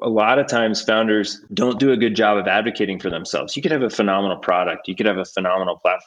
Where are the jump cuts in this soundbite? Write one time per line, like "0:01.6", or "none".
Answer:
0:01.4

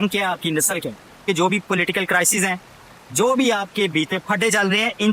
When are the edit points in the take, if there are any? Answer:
0:01.1

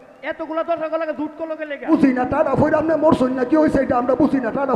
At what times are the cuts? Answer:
0:01.9

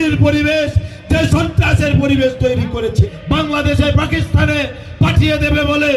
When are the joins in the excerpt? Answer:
0:03.0

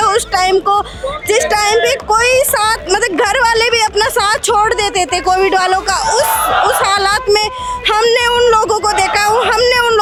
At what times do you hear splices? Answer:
none

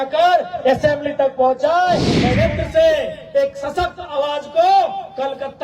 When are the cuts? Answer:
0:02.2

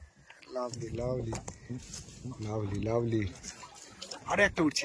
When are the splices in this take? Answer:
none

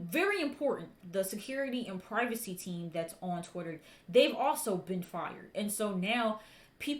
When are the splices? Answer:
0:01.0

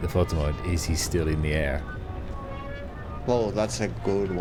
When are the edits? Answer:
none

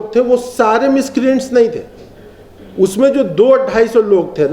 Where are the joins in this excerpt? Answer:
none

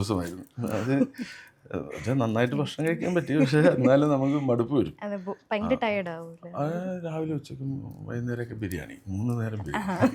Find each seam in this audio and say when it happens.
none

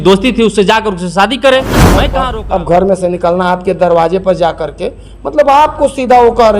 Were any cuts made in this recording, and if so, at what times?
0:02.1

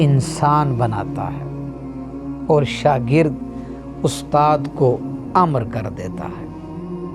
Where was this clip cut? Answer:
0:01.0
0:02.5

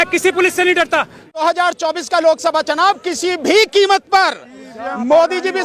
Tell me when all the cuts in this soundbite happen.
0:01.4

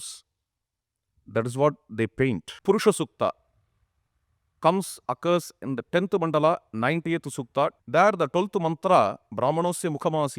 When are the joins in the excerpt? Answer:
0:02.5
0:07.8

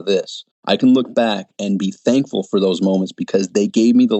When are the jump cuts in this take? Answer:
0:01.5

